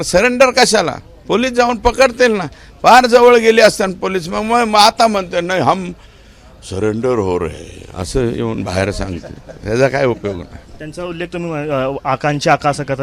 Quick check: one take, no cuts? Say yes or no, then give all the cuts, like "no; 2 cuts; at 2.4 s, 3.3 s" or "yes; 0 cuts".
yes; 0 cuts